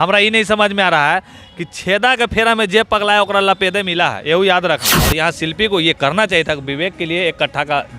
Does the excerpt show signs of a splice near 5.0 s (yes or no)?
yes